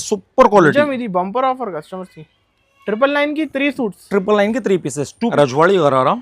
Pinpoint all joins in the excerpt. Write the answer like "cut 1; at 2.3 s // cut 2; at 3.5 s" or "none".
cut 1; at 5.1 s